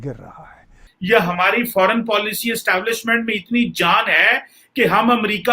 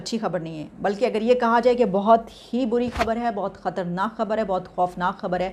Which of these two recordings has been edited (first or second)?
first